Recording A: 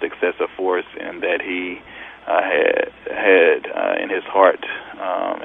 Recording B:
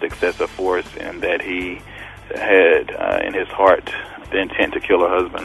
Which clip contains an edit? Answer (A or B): B